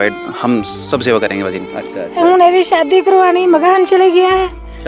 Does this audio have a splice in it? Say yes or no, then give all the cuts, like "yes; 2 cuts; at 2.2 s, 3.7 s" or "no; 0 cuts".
yes; 1 cut; at 1.7 s